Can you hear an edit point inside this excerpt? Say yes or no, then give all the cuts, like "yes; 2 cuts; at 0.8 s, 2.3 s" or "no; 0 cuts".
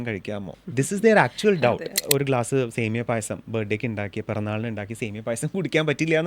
yes; 1 cut; at 1.9 s